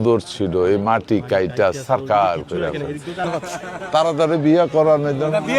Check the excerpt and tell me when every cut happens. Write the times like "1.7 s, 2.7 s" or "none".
3.3 s